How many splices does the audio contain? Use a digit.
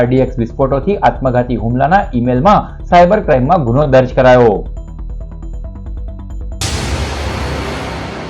1